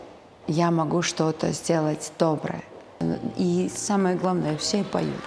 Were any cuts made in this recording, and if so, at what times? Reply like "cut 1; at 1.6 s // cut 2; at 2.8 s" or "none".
cut 1; at 2.9 s